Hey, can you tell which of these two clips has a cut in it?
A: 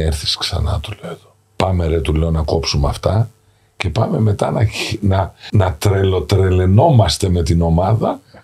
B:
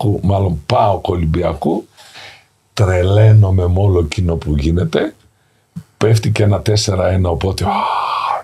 A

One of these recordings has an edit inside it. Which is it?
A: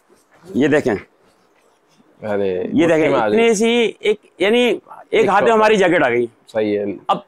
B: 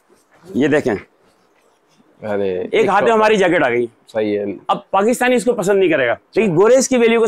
B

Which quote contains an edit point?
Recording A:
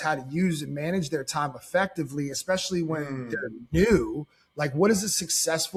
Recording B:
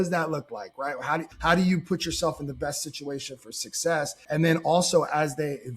B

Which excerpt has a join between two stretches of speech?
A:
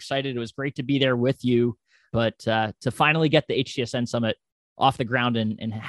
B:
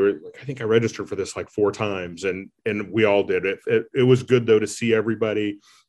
A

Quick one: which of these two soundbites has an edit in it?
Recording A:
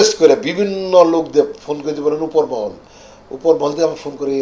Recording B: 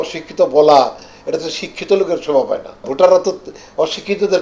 B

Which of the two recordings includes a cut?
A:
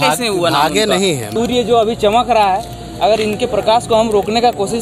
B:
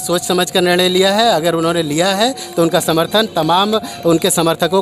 A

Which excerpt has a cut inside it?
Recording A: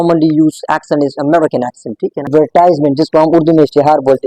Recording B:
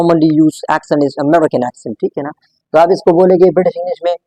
A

